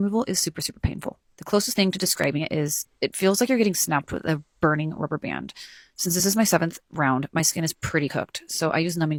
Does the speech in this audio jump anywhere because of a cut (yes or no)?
no